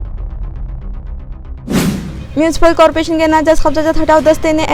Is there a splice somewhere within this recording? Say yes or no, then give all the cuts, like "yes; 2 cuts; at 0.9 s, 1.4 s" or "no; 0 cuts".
yes; 1 cut; at 1.8 s